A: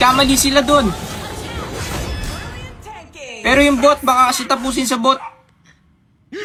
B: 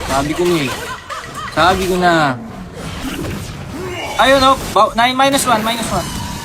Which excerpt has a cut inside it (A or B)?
B